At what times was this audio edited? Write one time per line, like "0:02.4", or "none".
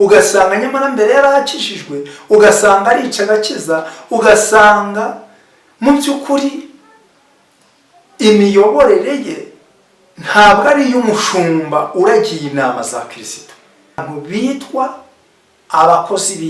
0:14.2